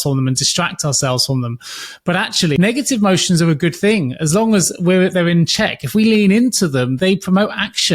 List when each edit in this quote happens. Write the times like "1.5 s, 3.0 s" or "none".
2.6 s, 6.9 s